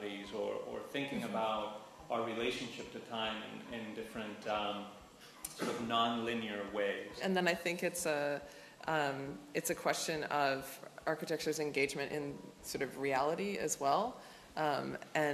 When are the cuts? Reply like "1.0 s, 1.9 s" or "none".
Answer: 7.2 s

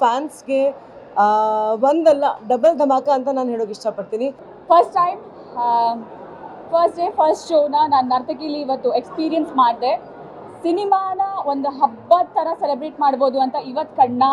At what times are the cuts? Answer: 4.4 s

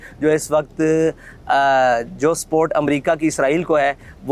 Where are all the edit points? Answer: none

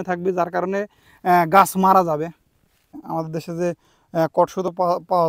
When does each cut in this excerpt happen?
3.0 s

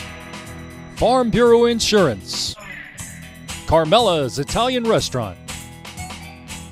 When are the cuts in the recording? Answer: 0.9 s

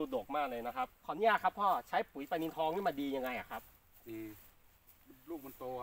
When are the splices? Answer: 1.0 s

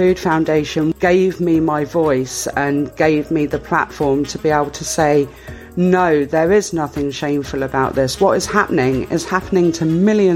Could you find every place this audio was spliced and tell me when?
0.9 s

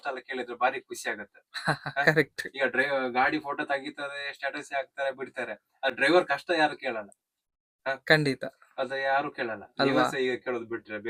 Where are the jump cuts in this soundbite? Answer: none

